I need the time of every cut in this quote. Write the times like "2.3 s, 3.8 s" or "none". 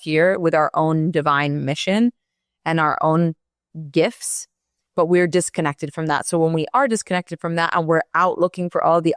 none